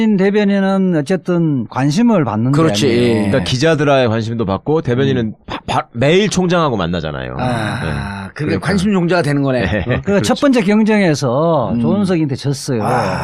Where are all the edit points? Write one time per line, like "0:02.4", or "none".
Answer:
0:02.4